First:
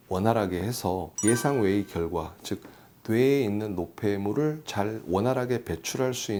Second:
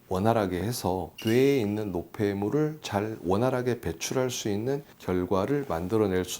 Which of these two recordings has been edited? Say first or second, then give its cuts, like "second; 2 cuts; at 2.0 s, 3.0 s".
second; 1 cut; at 1.1 s